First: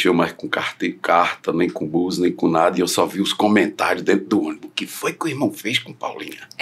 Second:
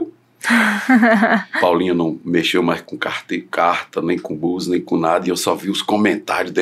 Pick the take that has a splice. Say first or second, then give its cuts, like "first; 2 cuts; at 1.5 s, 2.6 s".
second; 1 cut; at 1.5 s